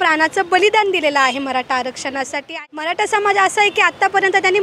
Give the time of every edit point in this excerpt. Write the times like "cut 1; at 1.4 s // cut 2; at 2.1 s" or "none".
cut 1; at 2.4 s